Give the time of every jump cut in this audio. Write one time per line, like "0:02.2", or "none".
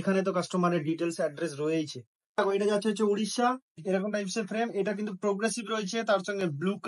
0:02.4
0:03.7